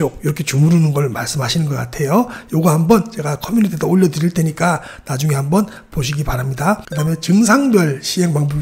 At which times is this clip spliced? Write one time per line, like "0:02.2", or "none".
0:06.9